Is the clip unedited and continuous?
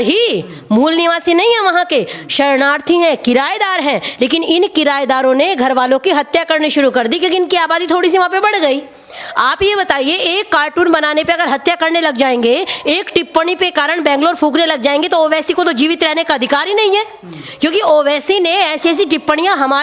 yes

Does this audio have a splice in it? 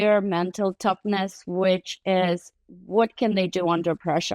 no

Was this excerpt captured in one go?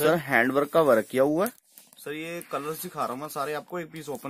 no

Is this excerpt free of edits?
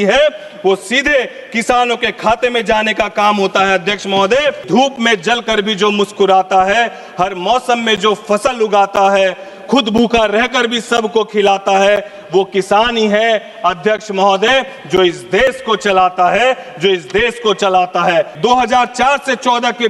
no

